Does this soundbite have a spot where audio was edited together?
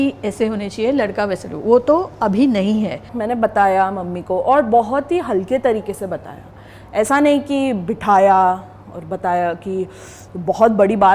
yes; 1 cut; at 3.1 s

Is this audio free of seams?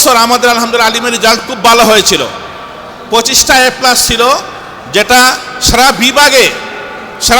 yes; 0 cuts

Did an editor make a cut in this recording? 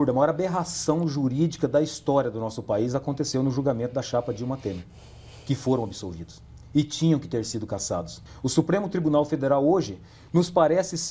yes; 1 cut; at 8.1 s

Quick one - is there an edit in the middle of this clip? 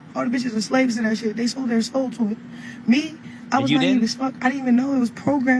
yes; 1 cut; at 4.6 s

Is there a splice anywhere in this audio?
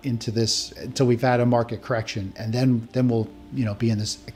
no; 0 cuts

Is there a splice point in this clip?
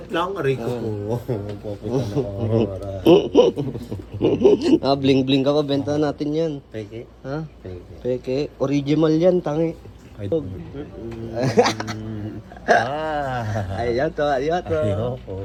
no; 0 cuts

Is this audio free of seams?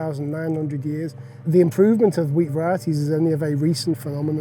no; 1 cut; at 1.5 s

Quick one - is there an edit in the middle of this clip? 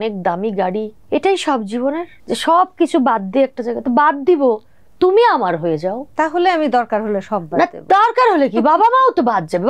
yes; 3 cuts; at 1.0 s, 2.1 s, 6.1 s

